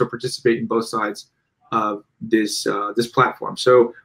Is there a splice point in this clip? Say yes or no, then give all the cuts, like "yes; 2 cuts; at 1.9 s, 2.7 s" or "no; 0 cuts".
no; 0 cuts